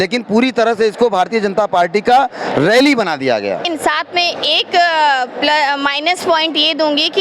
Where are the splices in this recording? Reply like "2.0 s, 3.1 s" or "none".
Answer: 3.6 s